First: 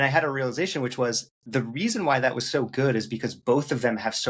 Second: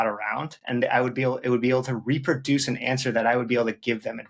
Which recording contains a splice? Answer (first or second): first